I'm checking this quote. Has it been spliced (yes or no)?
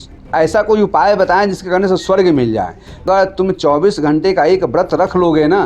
yes